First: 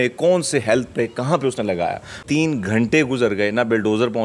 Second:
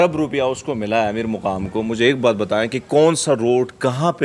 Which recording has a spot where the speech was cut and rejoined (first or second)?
first